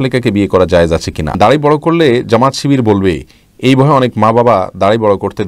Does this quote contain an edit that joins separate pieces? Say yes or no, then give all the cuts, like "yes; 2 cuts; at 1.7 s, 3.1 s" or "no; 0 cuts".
yes; 1 cut; at 1.3 s